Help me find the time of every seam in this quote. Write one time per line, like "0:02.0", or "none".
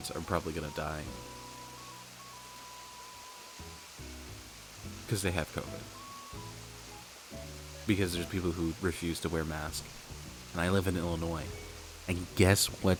none